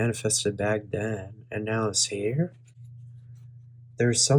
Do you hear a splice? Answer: no; 0 cuts

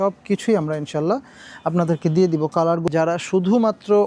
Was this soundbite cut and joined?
yes; 1 cut; at 2.8 s

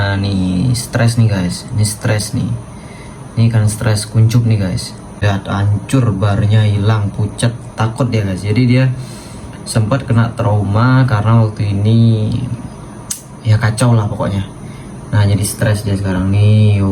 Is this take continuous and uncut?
no; 1 cut; at 5.2 s

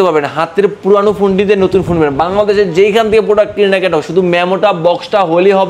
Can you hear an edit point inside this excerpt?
no; 0 cuts

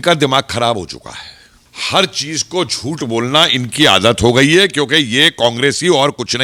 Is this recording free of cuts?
yes; 0 cuts

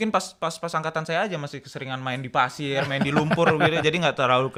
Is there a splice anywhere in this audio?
no; 0 cuts

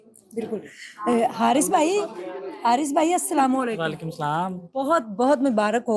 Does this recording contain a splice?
no; 0 cuts

